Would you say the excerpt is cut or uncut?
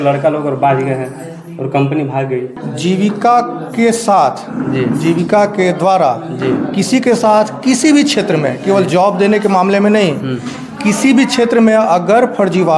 cut